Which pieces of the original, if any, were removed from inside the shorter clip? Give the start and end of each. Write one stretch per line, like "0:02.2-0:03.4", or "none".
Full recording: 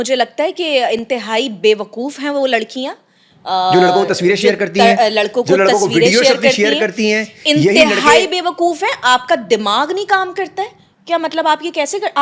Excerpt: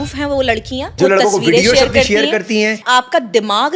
0:03.0-0:05.4
0:07.3-0:09.0